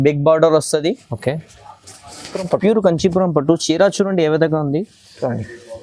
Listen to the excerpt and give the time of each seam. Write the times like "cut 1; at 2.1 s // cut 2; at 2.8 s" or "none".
cut 1; at 2.4 s